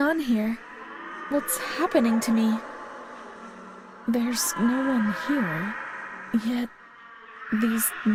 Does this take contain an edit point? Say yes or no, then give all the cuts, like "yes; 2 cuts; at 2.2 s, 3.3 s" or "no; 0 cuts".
no; 0 cuts